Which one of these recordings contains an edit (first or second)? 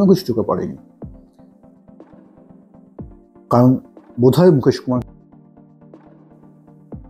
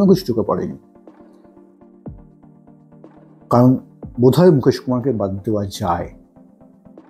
first